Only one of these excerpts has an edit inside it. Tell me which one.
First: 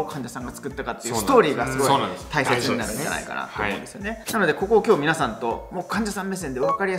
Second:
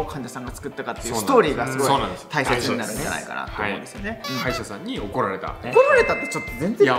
second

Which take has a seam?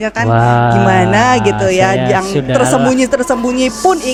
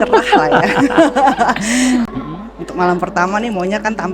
second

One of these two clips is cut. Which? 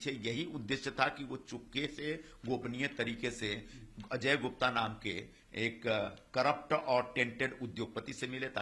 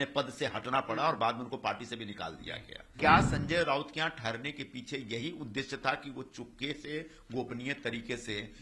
second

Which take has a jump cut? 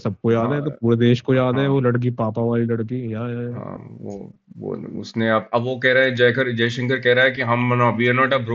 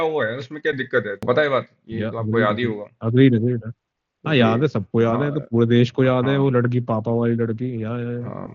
second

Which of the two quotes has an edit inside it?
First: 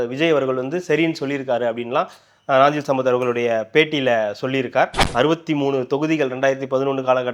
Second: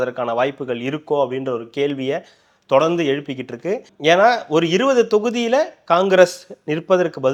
first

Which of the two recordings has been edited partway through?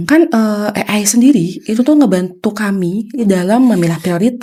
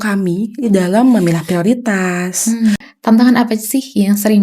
second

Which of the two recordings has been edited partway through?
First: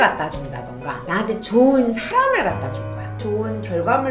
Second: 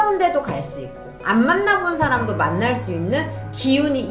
first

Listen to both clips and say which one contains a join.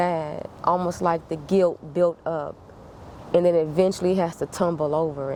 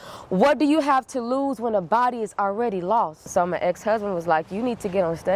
second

